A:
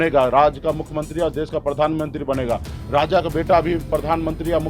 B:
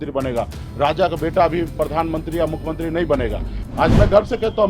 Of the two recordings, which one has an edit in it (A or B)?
B